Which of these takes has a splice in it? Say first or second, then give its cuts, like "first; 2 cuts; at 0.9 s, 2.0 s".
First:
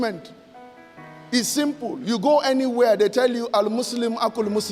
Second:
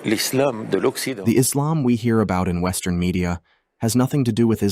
second; 1 cut; at 1.1 s